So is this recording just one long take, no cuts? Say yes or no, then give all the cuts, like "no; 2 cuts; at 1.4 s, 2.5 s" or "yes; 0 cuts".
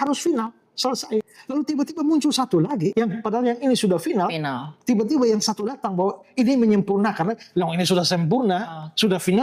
no; 2 cuts; at 1.4 s, 2.9 s